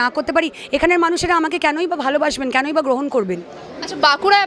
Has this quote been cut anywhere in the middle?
no; 0 cuts

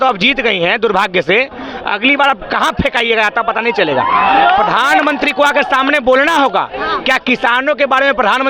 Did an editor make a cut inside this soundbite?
no; 0 cuts

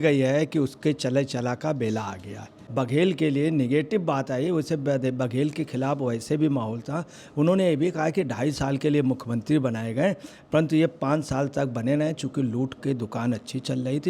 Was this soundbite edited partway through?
yes; 1 cut; at 2.5 s

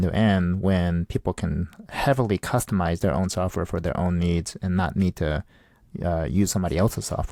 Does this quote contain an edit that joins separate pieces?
no; 0 cuts

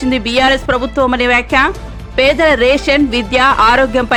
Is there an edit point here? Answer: no; 0 cuts

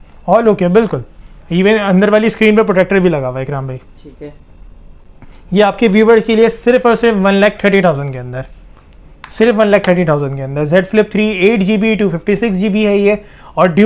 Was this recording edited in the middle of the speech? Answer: no; 0 cuts

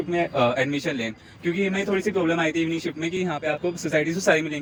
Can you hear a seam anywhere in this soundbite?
no; 0 cuts

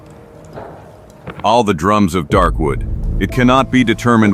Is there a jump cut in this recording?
no; 0 cuts

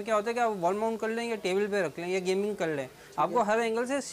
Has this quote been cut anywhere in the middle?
no; 0 cuts

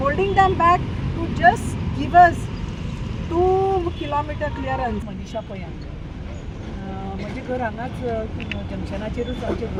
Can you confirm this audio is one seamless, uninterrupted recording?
yes; 0 cuts

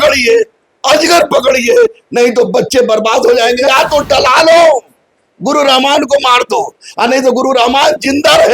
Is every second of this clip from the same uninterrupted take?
no; 1 cut; at 3.7 s

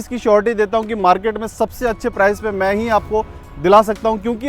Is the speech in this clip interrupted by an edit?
no; 0 cuts

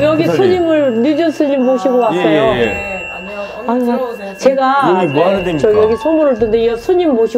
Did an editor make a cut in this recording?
no; 0 cuts

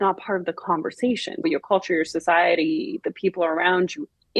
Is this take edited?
yes; 1 cut; at 1.4 s

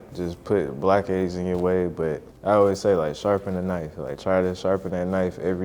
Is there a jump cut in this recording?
yes; 1 cut; at 2.3 s

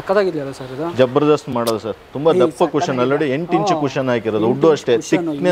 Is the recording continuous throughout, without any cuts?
yes; 0 cuts

